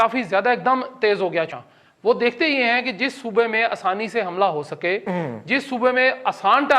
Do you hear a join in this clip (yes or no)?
yes